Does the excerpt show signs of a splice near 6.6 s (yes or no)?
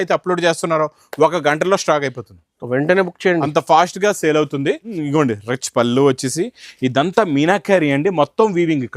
no